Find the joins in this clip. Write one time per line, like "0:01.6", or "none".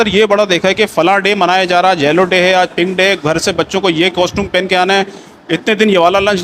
none